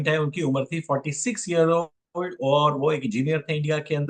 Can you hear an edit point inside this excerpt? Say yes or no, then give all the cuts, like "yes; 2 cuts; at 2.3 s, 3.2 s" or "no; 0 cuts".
no; 0 cuts